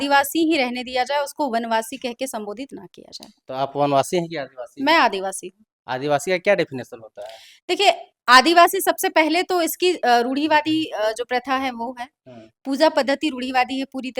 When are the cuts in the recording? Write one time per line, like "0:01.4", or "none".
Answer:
none